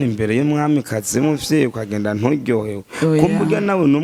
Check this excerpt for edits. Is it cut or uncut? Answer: uncut